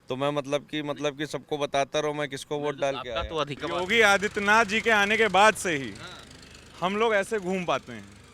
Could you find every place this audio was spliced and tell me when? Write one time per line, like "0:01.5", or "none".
0:03.6